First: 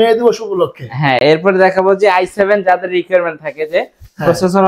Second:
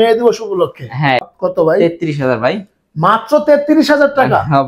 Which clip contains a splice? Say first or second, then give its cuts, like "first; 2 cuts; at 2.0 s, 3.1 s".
second; 1 cut; at 1.2 s